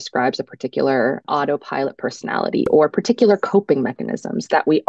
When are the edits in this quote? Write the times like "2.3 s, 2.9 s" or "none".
1.2 s